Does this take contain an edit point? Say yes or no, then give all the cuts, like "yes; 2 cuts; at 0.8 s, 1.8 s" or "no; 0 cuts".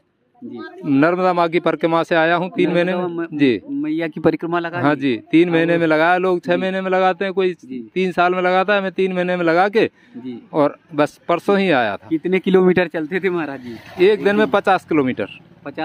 no; 0 cuts